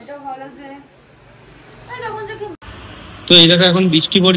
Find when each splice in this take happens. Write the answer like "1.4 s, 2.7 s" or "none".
2.6 s